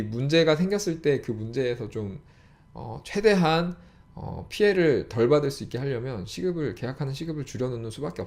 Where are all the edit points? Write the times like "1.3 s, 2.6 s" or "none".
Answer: none